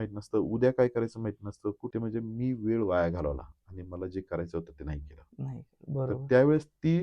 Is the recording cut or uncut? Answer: cut